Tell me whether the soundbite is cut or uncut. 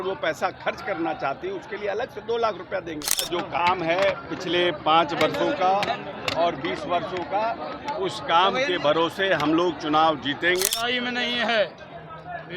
cut